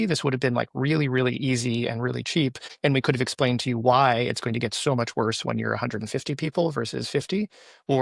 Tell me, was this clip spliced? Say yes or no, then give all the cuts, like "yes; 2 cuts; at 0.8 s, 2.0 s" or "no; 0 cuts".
yes; 1 cut; at 2.7 s